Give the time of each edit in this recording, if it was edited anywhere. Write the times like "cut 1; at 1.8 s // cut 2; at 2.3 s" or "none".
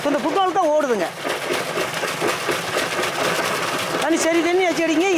none